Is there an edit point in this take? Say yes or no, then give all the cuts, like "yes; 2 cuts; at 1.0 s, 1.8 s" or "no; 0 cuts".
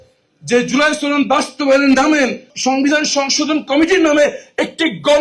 yes; 1 cut; at 2.5 s